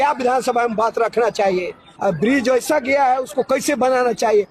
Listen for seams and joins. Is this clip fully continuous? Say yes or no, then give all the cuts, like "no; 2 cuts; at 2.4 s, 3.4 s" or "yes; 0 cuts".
yes; 0 cuts